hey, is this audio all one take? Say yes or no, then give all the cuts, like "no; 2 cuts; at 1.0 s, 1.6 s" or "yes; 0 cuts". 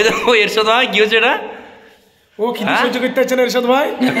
yes; 0 cuts